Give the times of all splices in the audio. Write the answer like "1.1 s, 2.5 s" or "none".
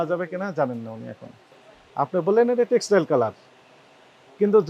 1.5 s